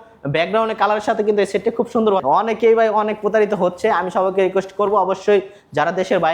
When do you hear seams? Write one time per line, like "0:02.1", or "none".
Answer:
0:02.2